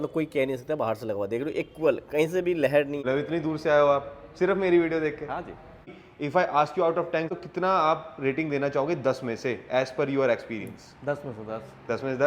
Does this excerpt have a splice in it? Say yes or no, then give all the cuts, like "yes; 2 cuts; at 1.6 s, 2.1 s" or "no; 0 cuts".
yes; 3 cuts; at 3.0 s, 6.0 s, 7.3 s